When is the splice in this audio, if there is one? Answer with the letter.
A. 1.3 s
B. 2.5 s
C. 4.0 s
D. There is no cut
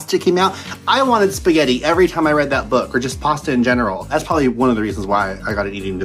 C